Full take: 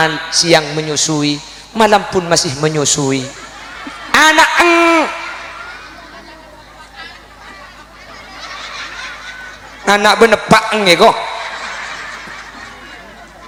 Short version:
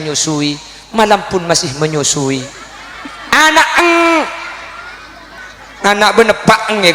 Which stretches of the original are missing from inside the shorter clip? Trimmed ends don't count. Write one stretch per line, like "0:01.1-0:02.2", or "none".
0:06.2-0:09.4